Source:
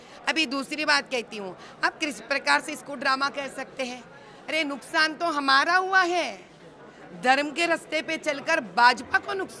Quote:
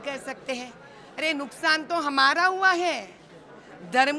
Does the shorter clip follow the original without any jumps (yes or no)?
yes